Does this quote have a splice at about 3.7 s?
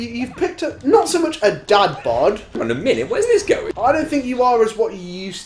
yes; 2 cuts; at 2.5 s, 3.7 s

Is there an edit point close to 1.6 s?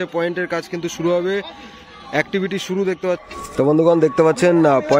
no; 1 cut; at 3.2 s

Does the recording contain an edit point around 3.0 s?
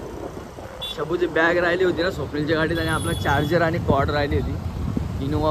no; 0 cuts

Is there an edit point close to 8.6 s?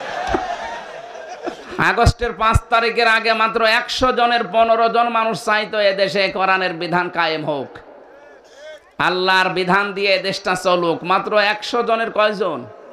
no; 1 cut; at 1.7 s

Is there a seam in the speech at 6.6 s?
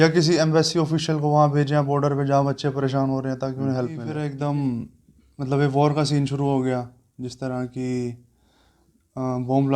no; 1 cut; at 4.1 s

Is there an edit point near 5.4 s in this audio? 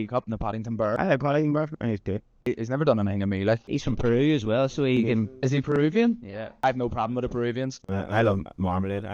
no; 1 cut; at 6.6 s

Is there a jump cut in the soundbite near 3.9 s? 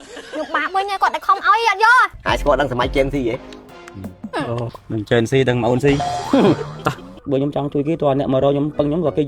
no; 1 cut; at 7.1 s

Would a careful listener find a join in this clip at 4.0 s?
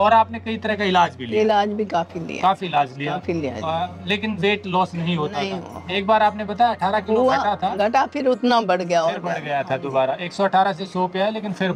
no; 0 cuts

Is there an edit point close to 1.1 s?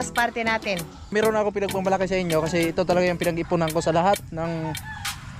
yes; 1 cut; at 1.1 s

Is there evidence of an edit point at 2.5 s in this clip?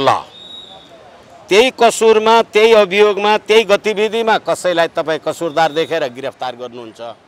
no; 0 cuts

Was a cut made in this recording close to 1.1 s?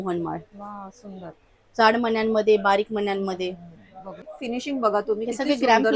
no; 1 cut; at 4.3 s

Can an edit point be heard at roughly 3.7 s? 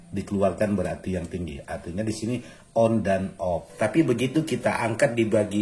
yes; 1 cut; at 3.7 s

